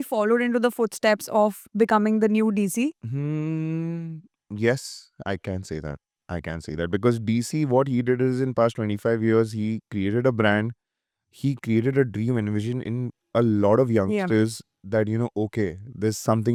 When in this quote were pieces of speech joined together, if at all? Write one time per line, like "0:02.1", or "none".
none